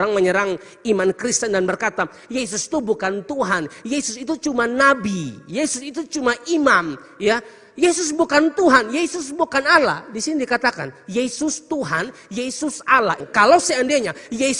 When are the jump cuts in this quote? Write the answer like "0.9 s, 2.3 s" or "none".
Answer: 13.3 s